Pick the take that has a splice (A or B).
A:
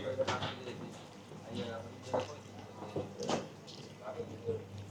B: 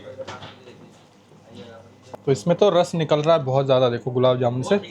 B